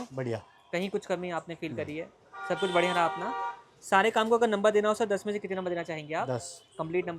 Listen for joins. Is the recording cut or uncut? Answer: uncut